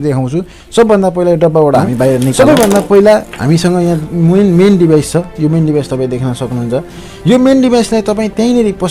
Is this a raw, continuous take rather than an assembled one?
no; 1 cut; at 2.3 s

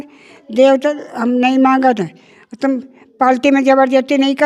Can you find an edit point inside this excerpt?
no; 0 cuts

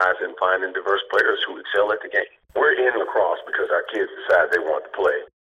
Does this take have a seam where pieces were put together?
yes; 1 cut; at 2.4 s

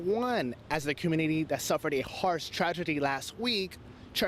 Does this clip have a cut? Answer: no; 0 cuts

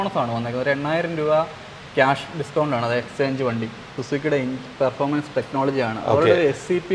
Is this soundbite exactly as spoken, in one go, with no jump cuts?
no; 1 cut; at 3.9 s

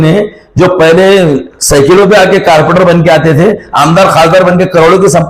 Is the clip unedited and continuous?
yes; 0 cuts

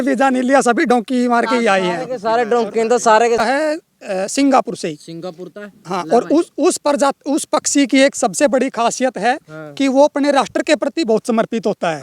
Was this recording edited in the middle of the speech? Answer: yes; 1 cut; at 3.4 s

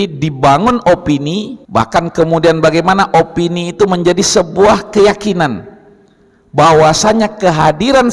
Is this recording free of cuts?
no; 1 cut; at 1.6 s

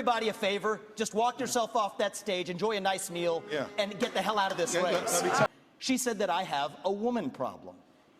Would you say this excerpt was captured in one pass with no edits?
no; 1 cut; at 5.5 s

